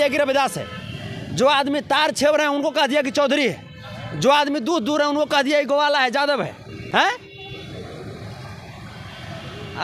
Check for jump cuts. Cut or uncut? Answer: uncut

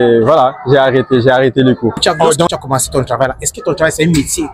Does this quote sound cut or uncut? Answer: cut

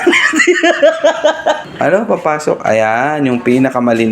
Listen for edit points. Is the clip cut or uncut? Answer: cut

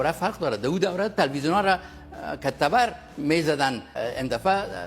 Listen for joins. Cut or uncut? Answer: cut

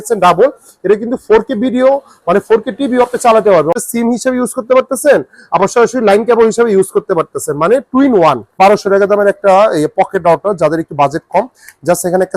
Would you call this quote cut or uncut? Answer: cut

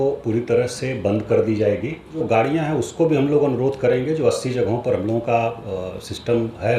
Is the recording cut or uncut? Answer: cut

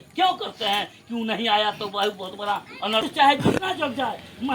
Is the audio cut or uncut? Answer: cut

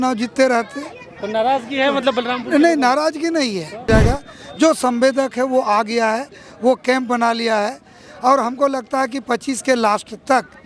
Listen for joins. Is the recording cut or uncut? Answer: cut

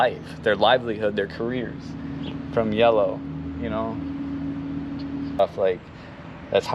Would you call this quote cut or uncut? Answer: cut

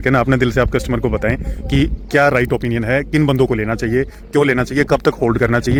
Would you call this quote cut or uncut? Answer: uncut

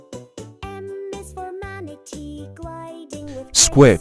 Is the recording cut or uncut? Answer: cut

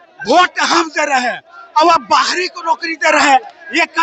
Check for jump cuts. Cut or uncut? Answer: uncut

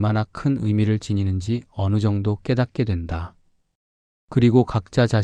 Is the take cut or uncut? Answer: uncut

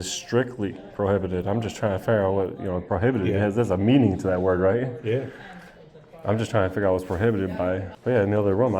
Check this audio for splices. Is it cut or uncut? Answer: cut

